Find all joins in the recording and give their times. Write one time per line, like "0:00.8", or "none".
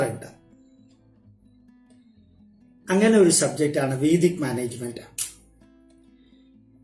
0:00.9
0:02.9